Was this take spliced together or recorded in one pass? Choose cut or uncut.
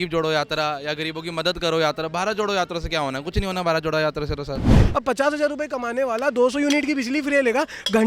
cut